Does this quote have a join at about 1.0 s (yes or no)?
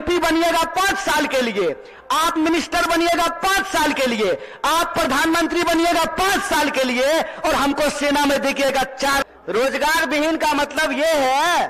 no